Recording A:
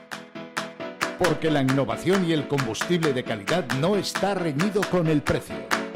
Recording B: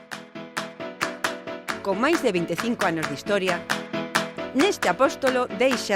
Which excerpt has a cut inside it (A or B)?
B